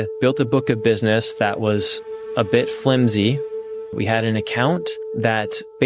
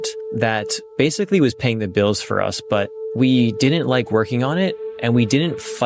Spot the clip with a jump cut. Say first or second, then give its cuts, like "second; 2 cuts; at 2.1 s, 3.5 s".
first; 1 cut; at 3.8 s